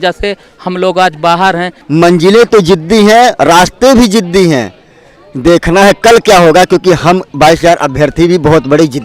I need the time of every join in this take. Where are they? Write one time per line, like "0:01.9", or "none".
0:01.7